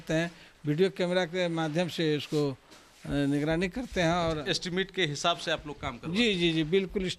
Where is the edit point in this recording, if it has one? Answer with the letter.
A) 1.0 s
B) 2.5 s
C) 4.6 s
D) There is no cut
D